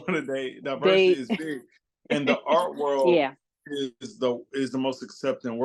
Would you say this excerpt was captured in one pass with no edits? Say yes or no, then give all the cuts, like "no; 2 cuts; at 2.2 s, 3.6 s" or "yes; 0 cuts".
yes; 0 cuts